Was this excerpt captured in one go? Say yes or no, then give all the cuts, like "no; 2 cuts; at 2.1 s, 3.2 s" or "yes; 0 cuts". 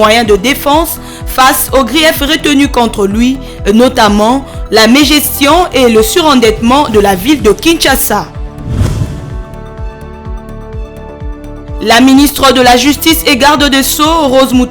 no; 1 cut; at 8.3 s